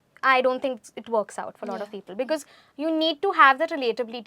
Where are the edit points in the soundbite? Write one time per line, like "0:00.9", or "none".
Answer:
none